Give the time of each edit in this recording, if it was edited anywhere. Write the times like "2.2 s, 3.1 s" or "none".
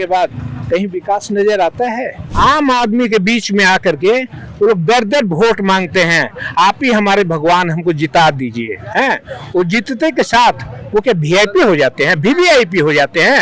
2.2 s